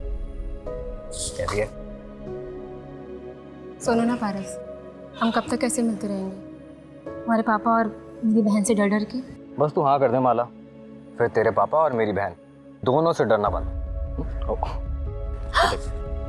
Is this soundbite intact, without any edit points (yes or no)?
yes